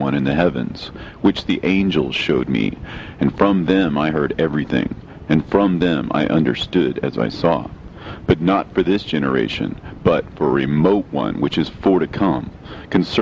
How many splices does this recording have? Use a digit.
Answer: 1